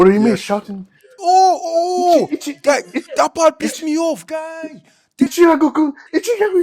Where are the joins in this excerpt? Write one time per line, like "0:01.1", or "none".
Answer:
none